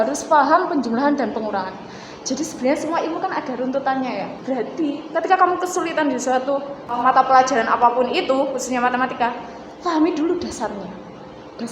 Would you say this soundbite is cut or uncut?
cut